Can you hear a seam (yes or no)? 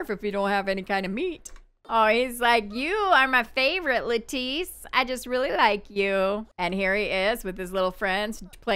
yes